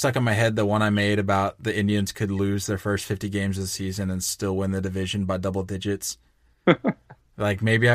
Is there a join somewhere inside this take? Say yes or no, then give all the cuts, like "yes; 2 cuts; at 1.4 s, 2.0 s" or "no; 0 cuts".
no; 0 cuts